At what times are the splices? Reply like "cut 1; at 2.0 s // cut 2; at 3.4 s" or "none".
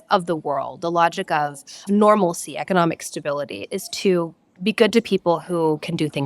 cut 1; at 1.8 s // cut 2; at 3.7 s